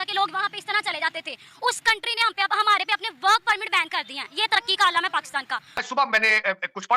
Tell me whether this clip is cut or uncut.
cut